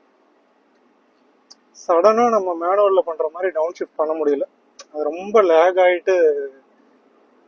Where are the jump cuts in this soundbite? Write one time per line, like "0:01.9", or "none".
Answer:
none